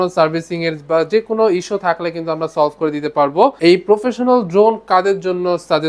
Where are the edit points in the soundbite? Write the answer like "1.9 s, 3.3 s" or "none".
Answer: none